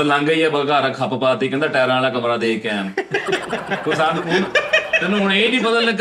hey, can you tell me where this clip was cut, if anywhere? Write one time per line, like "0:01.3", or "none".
none